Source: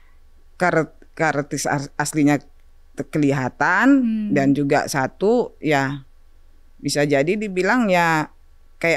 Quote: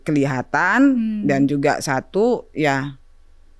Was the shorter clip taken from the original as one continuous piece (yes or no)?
yes